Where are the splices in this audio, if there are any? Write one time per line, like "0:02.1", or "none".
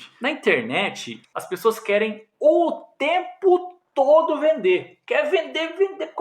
0:01.2

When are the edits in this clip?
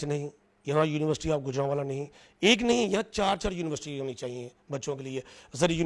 none

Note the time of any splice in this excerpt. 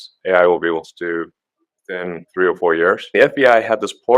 0:02.2
0:03.1

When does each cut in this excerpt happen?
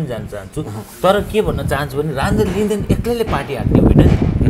none

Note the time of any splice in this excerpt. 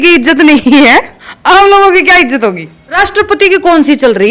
0:02.8

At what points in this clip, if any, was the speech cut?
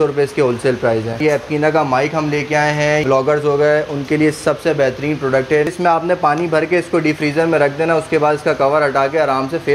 0:01.2
0:03.0
0:05.7

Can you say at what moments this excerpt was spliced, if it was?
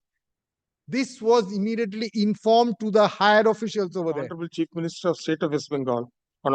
0:04.4

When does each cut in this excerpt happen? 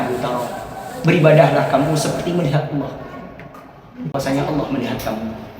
0:04.1

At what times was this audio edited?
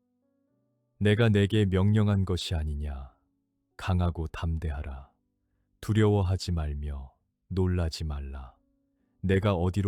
0:00.9

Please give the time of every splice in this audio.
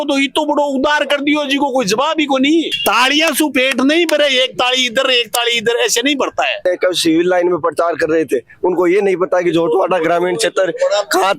0:02.7
0:06.6

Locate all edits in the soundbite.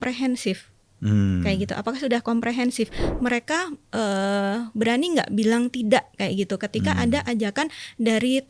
0:03.0

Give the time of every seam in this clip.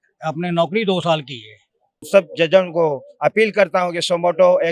0:02.0

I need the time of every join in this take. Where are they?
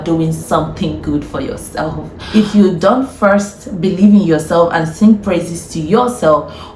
0:02.1

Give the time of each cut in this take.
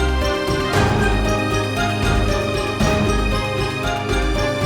0:03.5

